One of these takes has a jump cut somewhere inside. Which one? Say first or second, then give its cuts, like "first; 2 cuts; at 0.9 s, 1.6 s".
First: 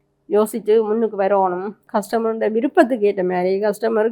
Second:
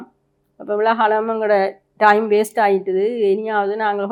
first; 1 cut; at 1.8 s